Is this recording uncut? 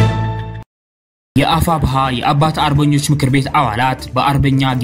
no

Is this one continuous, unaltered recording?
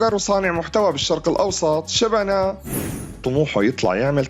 no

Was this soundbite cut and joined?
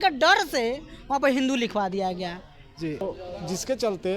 yes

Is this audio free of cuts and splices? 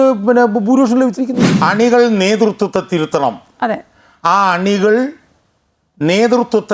no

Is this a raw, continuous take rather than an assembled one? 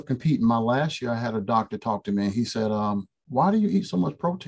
yes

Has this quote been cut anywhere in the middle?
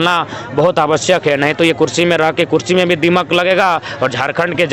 no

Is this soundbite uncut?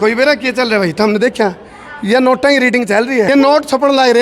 no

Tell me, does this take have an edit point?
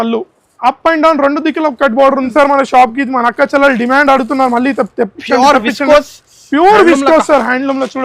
yes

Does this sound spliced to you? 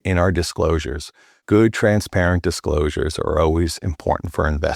no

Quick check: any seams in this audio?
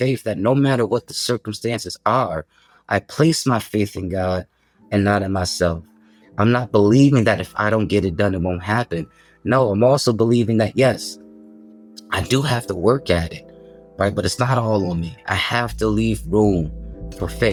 no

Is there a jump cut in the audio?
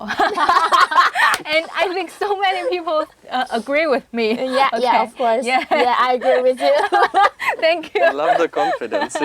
no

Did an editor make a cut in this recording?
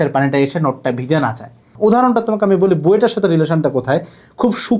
yes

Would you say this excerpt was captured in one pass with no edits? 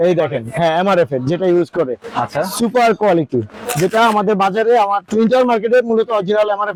yes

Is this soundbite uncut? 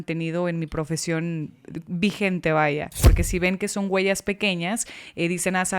no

